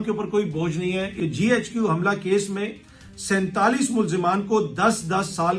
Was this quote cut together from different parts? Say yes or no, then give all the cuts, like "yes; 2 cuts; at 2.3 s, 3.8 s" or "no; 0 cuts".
yes; 1 cut; at 1.1 s